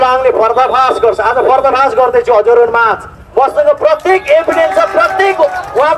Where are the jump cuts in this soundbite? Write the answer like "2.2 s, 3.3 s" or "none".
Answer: none